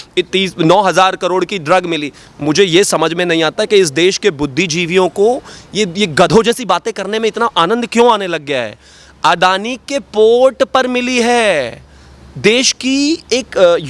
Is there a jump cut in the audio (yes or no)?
no